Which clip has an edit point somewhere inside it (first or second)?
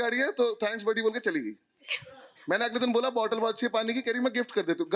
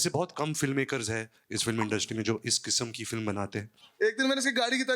second